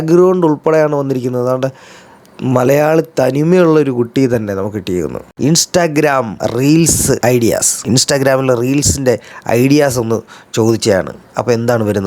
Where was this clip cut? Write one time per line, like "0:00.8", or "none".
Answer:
0:05.3